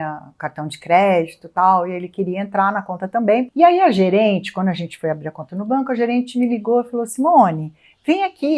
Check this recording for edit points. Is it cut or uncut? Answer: cut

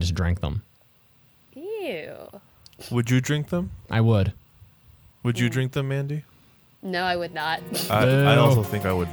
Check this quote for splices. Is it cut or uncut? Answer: uncut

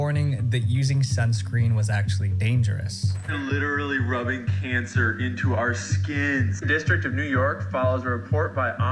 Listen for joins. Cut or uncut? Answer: uncut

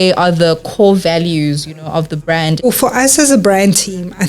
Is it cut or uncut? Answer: cut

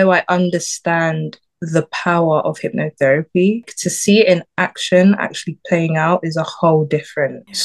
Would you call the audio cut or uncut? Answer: uncut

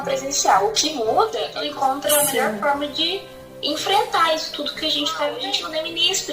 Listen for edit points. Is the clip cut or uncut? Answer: cut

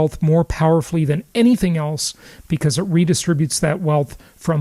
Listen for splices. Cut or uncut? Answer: uncut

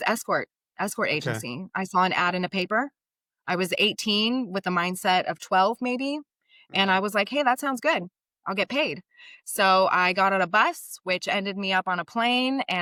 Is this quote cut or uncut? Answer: uncut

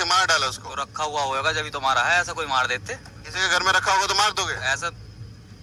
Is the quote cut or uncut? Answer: uncut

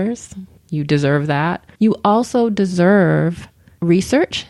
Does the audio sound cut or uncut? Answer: cut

